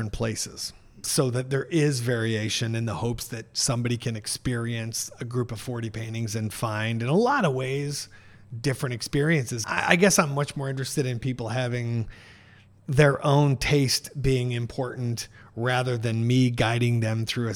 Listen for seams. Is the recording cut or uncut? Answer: cut